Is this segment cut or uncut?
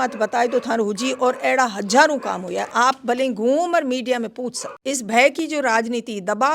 cut